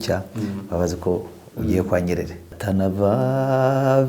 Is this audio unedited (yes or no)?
no